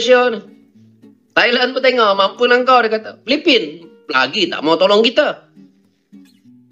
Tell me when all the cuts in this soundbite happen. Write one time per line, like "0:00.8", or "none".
none

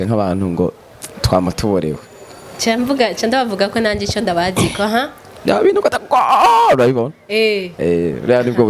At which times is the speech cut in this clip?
none

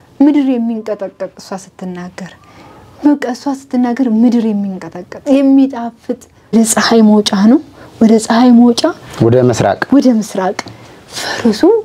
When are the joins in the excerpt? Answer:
0:06.5

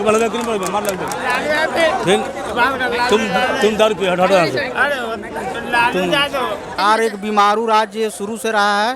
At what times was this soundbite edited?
0:06.7

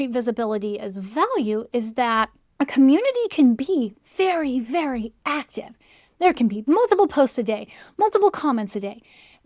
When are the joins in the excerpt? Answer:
0:02.4
0:06.6

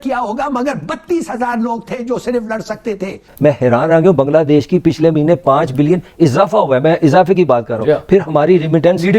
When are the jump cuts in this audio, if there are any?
0:03.3

